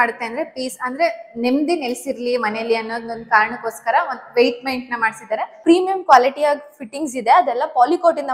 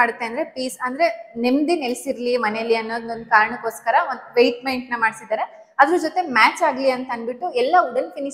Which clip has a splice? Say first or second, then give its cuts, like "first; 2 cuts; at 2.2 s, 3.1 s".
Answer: first; 1 cut; at 5.5 s